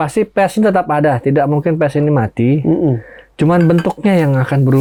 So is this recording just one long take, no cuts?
yes; 0 cuts

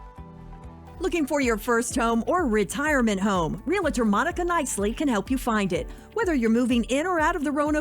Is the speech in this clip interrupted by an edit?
yes; 1 cut; at 0.9 s

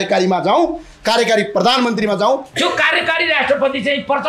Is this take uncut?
no; 1 cut; at 2.5 s

